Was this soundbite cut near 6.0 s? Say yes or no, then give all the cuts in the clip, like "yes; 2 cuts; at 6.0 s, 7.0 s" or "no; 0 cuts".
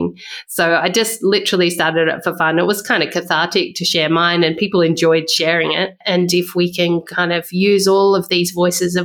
yes; 1 cut; at 6.0 s